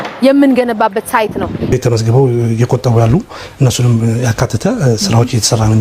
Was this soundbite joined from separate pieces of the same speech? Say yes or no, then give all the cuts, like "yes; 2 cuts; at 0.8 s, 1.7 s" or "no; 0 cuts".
yes; 1 cut; at 1.7 s